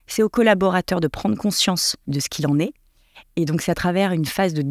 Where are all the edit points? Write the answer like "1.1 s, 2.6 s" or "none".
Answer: 2.0 s

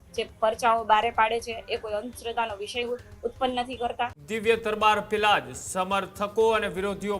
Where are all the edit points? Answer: 4.2 s

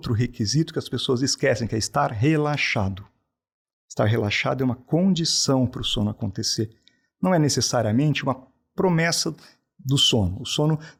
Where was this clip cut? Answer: none

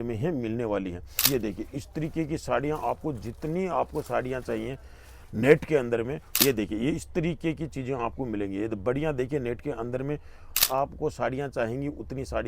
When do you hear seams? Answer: 1.1 s, 6.4 s, 10.6 s

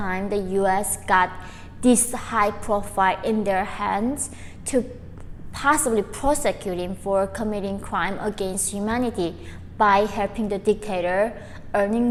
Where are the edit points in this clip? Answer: none

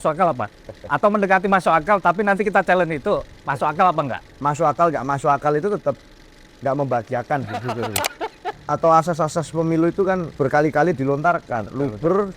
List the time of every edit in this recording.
8.6 s

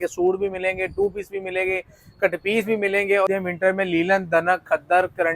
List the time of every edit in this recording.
3.3 s

